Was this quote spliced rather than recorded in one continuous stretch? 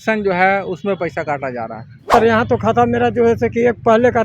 yes; 1 cut; at 2.1 s

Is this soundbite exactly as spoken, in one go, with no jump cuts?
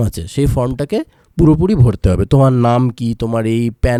yes; 0 cuts

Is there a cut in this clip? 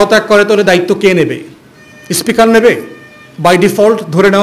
no; 0 cuts

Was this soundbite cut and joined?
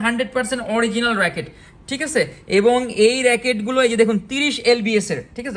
no; 0 cuts

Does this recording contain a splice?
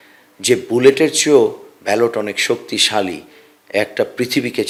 no; 0 cuts

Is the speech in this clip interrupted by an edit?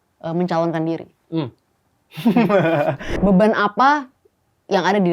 yes; 1 cut; at 3.1 s

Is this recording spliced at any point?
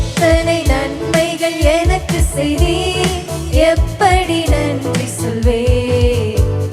no; 0 cuts

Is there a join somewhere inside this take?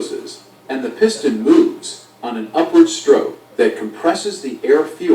yes; 1 cut; at 3.9 s

